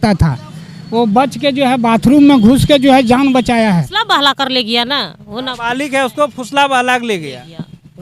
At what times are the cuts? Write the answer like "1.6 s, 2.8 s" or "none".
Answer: 4.2 s